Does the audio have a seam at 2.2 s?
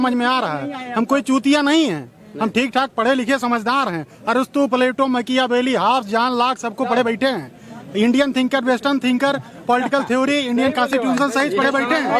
no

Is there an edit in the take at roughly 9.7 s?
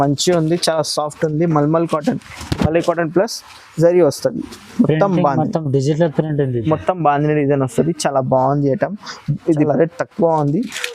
yes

